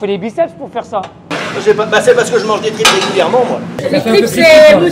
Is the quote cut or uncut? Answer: cut